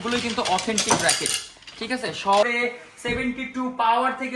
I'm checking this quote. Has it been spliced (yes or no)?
yes